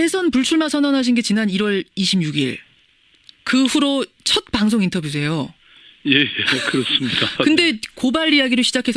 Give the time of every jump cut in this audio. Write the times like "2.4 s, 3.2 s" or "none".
3.7 s

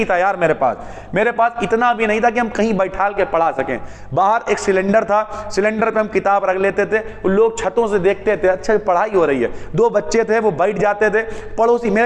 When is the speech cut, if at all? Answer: none

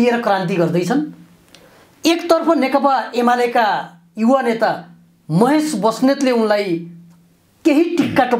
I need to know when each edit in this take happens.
none

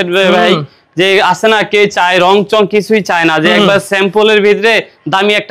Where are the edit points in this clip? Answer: none

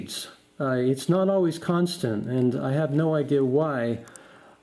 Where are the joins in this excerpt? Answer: 1.2 s

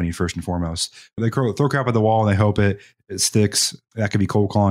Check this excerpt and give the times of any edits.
none

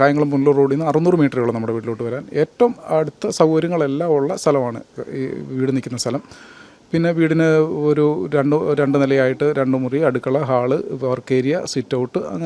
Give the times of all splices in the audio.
none

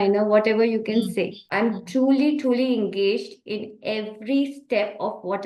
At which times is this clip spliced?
1.4 s

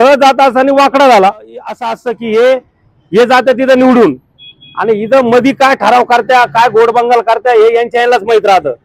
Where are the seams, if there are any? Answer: 1.8 s

